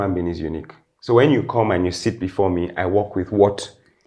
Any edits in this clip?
no; 0 cuts

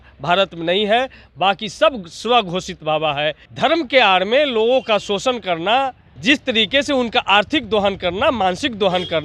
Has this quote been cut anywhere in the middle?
yes; 2 cuts; at 3.4 s, 6.1 s

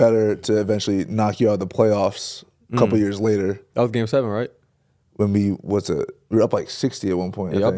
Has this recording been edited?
no; 0 cuts

